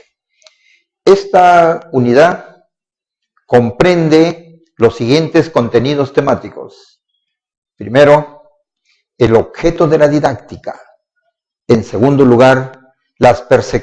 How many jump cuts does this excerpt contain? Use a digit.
0